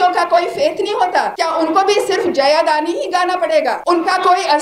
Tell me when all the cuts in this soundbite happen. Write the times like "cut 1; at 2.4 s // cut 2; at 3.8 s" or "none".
cut 1; at 1.3 s // cut 2; at 3.8 s